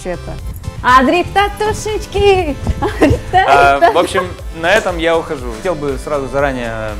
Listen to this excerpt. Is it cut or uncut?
cut